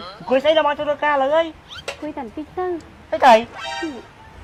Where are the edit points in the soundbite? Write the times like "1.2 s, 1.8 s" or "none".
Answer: none